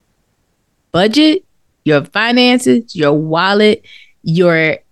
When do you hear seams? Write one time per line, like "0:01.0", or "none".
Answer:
none